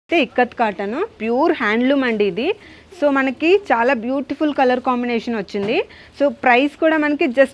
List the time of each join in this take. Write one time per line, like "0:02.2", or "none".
none